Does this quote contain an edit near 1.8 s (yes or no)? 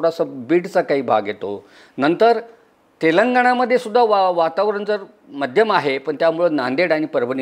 no